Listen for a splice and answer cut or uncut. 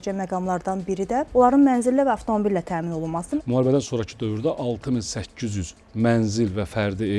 cut